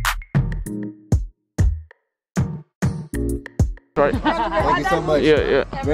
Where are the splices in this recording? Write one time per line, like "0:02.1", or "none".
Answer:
0:03.9